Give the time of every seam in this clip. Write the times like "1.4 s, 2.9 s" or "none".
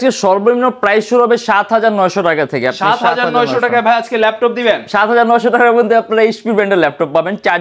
none